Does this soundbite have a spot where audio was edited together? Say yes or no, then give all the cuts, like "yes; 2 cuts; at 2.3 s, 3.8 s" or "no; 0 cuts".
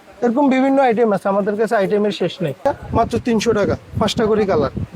yes; 1 cut; at 2.6 s